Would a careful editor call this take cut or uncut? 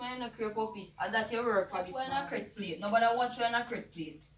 cut